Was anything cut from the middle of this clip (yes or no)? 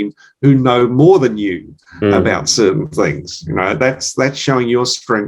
no